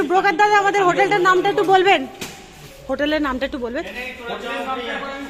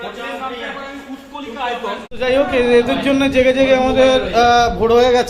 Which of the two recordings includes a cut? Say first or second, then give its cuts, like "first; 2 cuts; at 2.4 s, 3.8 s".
second; 1 cut; at 2.1 s